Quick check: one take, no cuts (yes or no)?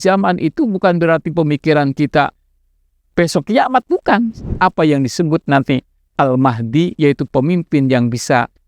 no